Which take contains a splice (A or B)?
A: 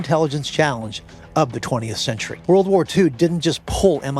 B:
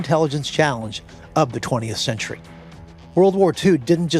A